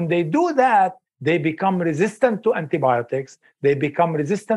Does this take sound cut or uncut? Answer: cut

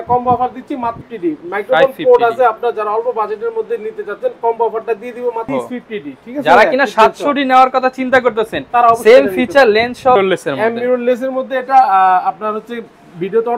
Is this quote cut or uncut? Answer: cut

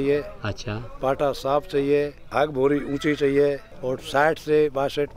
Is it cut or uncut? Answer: cut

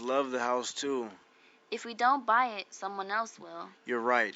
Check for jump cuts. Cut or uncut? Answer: uncut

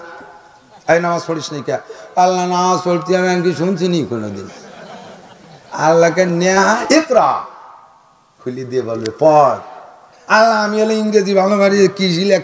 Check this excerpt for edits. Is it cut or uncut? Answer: cut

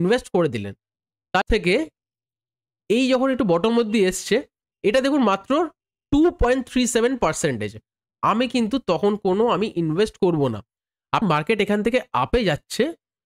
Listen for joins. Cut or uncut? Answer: cut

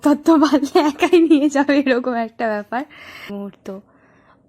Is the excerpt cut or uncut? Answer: cut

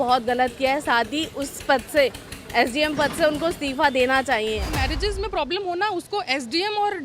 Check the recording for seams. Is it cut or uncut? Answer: cut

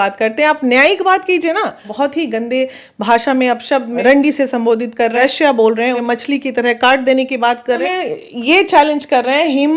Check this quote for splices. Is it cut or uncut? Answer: cut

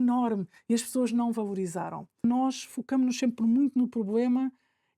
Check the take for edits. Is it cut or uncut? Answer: cut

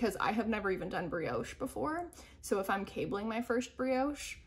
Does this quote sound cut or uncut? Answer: uncut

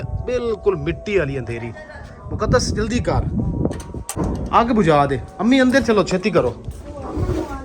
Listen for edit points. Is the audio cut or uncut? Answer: cut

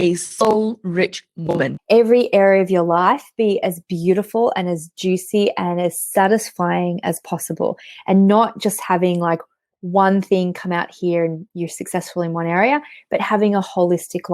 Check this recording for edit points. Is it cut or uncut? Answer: cut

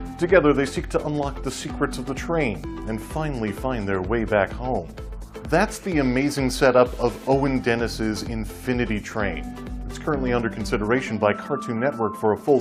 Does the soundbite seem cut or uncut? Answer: cut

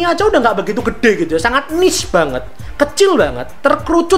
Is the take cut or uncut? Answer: uncut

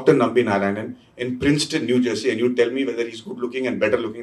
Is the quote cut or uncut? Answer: uncut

